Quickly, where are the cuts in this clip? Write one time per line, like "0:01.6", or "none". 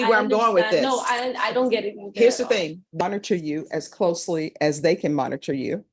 0:03.0